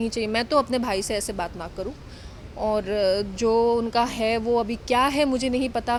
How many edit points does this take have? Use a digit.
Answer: 0